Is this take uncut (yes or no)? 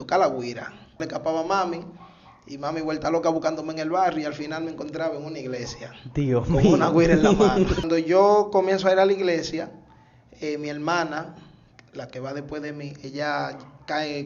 no